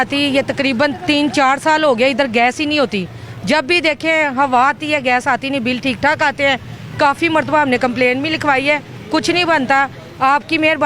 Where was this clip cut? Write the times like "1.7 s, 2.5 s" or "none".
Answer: none